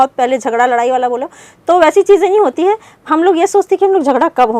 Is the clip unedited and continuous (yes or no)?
yes